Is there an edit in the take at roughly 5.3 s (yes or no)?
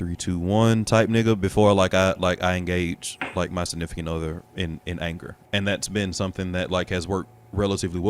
yes